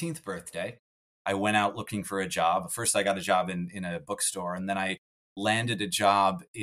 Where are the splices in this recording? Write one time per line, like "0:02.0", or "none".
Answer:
0:01.0